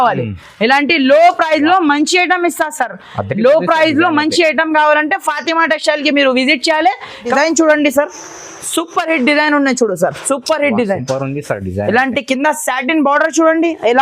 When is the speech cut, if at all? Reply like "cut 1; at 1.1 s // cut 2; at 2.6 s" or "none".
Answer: cut 1; at 7.3 s